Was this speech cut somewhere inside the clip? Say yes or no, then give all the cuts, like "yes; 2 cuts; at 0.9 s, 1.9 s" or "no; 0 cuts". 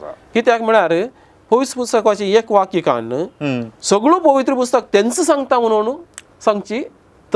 no; 0 cuts